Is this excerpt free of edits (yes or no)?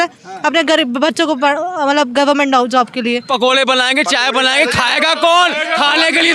no